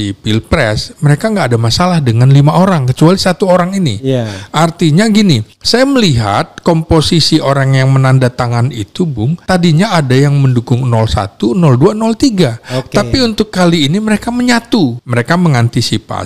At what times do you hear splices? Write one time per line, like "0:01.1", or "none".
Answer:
0:05.5
0:09.4
0:15.0